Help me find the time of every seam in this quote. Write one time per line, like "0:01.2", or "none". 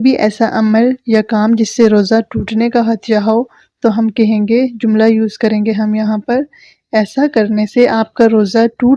none